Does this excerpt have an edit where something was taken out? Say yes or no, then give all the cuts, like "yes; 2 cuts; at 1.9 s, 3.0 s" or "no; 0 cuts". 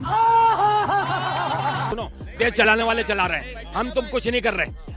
yes; 1 cut; at 1.9 s